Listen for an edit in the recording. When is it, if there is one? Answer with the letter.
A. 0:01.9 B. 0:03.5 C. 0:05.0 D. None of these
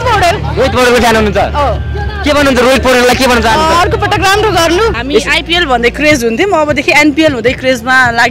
C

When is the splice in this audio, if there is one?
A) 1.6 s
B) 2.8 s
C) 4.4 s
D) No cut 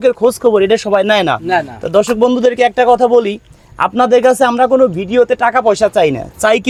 D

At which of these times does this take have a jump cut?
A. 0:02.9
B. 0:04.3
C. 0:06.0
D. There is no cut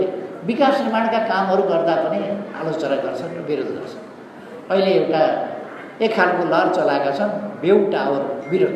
D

